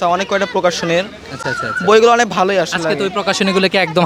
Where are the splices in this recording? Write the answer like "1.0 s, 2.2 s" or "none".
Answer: none